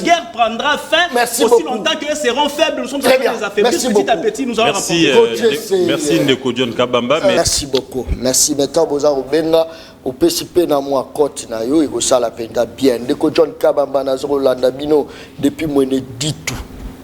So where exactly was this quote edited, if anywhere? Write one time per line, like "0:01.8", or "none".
0:07.4